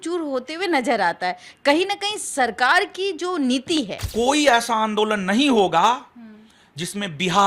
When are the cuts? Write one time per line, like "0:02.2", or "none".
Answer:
0:04.0